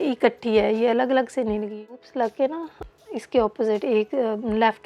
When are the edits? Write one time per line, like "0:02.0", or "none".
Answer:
0:01.9